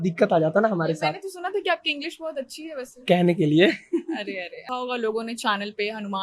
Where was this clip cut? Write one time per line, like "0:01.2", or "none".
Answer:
0:04.7